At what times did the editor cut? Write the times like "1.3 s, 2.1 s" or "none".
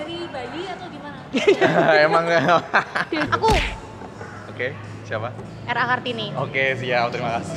3.3 s

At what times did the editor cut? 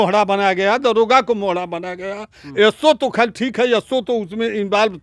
none

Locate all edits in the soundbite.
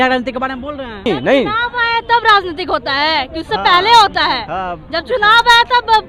1.1 s

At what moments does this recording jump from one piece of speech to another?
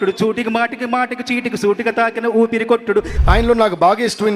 3.2 s

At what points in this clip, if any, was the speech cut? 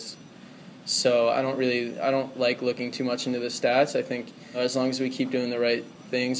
4.6 s

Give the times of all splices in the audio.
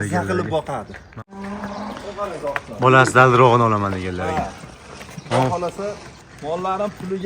1.1 s

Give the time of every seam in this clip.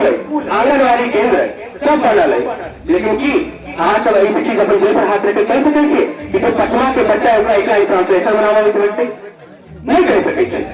none

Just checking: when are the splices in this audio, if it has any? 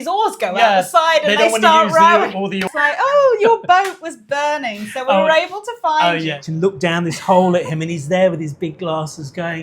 2.7 s, 6.4 s

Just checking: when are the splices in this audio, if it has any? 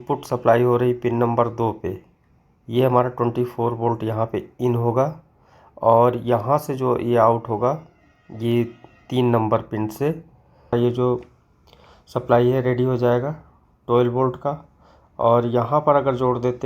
10.7 s

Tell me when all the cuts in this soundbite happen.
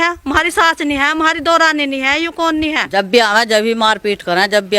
2.8 s

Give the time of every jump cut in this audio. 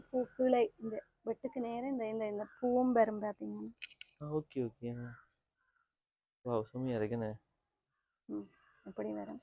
none

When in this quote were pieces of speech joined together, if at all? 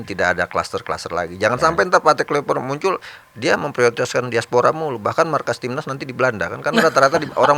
none

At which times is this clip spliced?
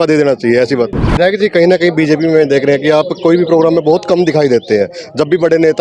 1.0 s

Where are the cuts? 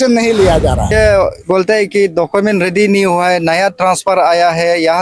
0.9 s

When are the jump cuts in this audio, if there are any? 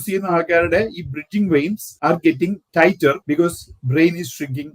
1.9 s, 3.1 s

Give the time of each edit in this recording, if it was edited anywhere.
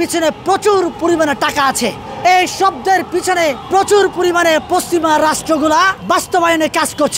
2.1 s, 3.6 s, 6.0 s

